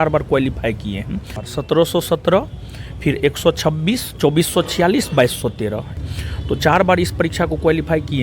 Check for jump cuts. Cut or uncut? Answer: cut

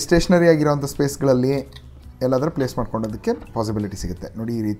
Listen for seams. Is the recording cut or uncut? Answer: uncut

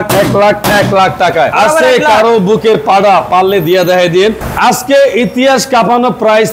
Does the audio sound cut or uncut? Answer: cut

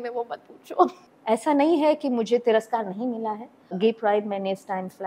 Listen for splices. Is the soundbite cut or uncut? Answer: cut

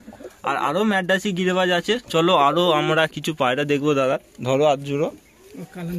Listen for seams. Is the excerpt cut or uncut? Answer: uncut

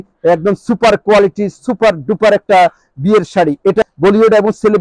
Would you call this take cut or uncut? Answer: cut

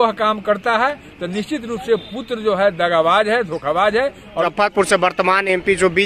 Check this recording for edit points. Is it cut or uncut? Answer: cut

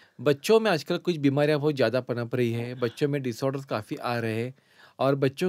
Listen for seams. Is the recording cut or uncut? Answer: uncut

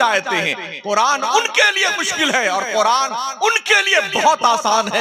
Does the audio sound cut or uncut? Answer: uncut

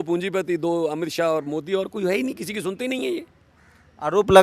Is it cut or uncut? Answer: uncut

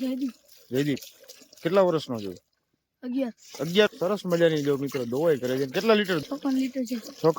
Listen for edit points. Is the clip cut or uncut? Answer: cut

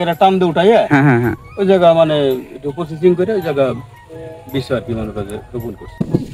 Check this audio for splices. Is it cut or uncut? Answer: uncut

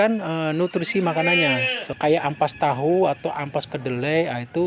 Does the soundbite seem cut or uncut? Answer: cut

